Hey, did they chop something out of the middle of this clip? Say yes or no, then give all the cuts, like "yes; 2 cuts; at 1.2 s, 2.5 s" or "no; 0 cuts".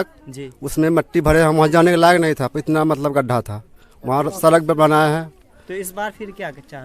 no; 0 cuts